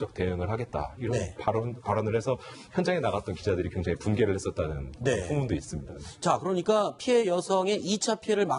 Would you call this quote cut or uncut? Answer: uncut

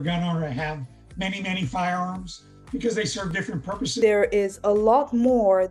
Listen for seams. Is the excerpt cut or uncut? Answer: cut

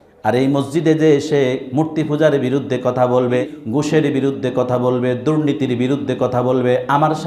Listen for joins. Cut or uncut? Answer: cut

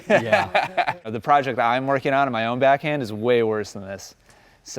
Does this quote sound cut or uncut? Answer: cut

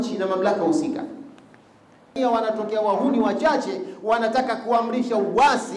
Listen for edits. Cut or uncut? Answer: cut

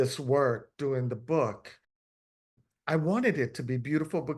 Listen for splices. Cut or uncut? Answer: cut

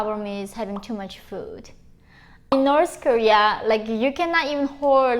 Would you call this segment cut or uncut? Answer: cut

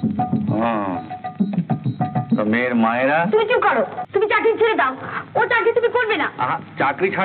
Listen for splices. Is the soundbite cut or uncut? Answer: cut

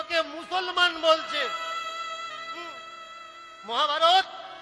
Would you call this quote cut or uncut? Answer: uncut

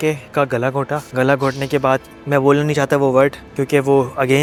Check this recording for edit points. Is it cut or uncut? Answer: uncut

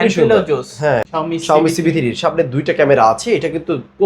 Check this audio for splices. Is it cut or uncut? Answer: cut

